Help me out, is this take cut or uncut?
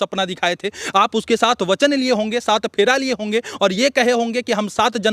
uncut